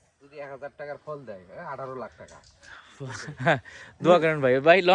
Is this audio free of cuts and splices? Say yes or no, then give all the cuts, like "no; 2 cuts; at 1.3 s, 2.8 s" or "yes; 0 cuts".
yes; 0 cuts